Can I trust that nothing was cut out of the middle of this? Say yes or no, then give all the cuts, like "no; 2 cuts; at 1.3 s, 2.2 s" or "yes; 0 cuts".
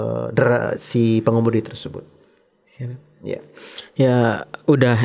yes; 0 cuts